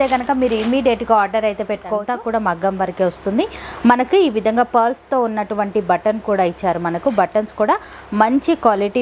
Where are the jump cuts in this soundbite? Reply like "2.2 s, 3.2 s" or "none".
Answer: 2.0 s